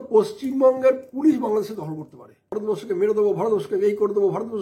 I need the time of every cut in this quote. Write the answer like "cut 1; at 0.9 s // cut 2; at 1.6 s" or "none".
cut 1; at 2.5 s